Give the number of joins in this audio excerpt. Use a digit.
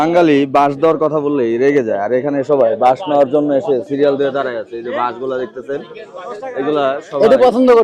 0